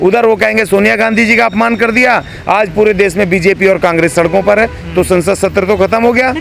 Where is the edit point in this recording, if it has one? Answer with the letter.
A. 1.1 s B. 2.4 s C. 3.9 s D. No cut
D